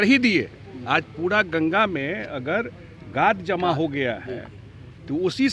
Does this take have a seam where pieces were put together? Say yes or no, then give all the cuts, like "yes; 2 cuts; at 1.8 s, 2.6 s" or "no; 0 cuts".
no; 0 cuts